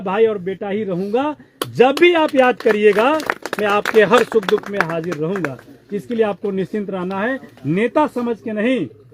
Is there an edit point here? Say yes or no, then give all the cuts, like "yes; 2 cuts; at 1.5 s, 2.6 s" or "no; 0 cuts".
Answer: no; 0 cuts